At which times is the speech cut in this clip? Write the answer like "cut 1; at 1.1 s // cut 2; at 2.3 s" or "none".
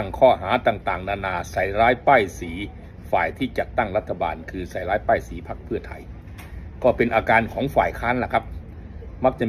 none